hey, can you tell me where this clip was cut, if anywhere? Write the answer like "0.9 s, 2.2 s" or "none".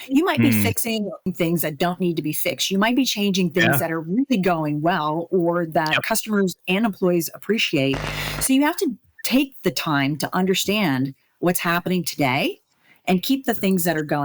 1.2 s